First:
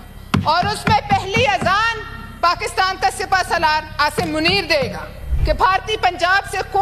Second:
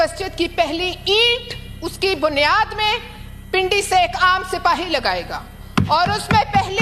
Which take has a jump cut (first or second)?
first